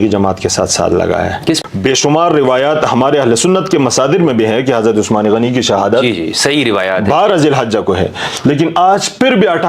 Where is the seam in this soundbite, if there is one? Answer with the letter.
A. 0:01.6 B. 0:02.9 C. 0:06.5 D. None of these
A